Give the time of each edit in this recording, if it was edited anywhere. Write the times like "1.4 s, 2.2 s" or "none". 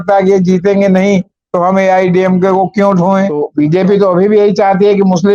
3.4 s